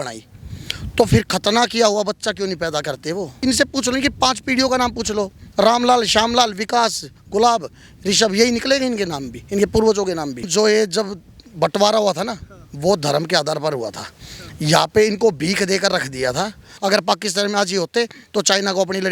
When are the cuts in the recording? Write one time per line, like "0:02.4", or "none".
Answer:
0:03.4
0:10.5
0:16.6